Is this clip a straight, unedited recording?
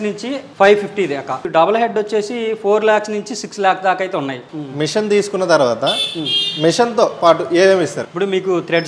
no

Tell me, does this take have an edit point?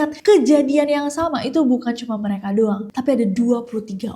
no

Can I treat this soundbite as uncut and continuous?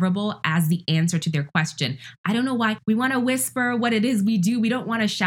no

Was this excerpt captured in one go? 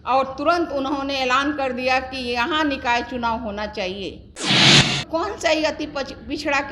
no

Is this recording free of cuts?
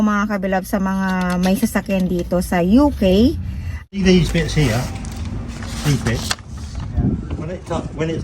no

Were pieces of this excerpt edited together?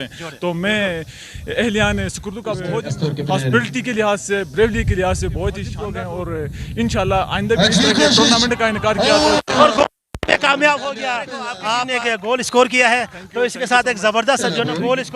yes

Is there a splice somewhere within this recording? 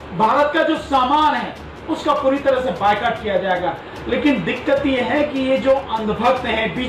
no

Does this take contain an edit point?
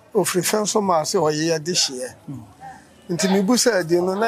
no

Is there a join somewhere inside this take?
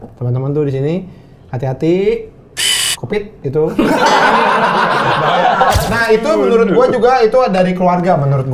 yes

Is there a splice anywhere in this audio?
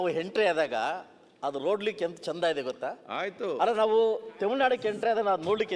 no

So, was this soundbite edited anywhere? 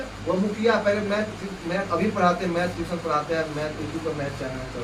no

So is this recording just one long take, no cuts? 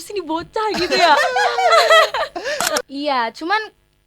no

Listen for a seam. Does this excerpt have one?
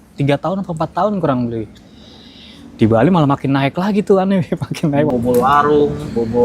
yes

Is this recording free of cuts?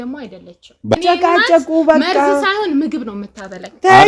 no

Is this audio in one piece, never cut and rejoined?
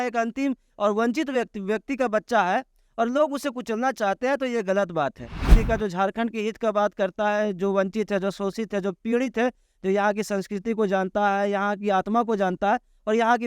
no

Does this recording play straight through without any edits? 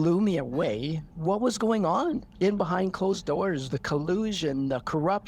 no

